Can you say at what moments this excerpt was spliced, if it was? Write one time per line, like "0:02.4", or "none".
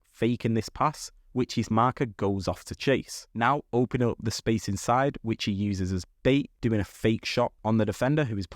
0:03.2
0:06.5